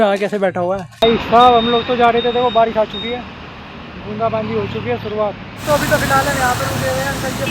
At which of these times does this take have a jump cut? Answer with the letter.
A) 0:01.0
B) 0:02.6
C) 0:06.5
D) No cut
A